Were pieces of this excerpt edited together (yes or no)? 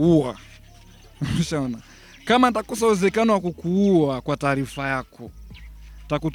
no